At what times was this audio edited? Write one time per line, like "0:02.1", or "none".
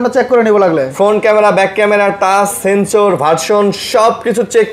none

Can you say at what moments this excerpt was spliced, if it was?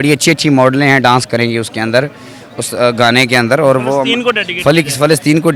none

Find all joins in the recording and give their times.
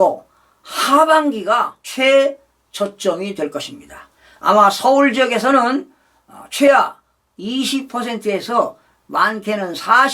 none

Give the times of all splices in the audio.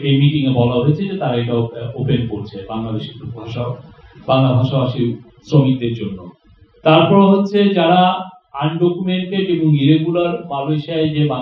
none

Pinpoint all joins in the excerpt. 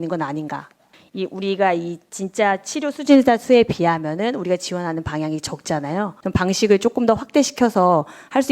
0:06.2

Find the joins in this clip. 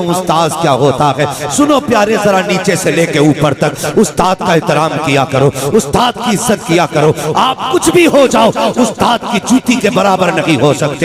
none

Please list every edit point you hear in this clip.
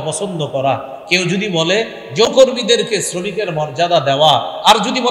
0:02.3

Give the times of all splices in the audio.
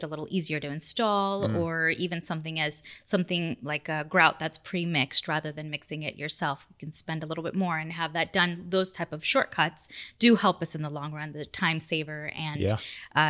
none

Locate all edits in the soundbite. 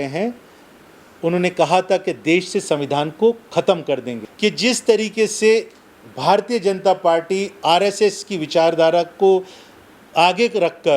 0:04.3

